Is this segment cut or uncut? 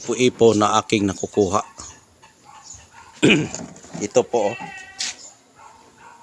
uncut